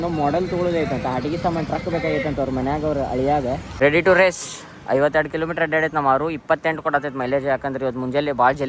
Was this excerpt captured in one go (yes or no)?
no